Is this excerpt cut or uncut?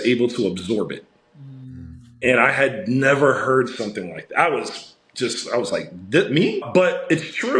cut